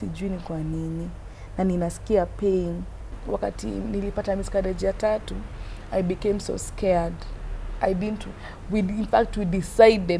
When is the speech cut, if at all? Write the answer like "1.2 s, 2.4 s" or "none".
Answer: 3.2 s